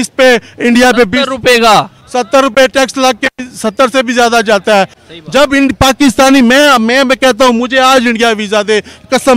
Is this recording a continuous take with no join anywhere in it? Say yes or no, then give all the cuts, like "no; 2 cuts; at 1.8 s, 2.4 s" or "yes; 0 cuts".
no; 1 cut; at 5.0 s